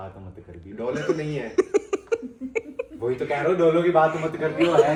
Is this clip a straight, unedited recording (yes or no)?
yes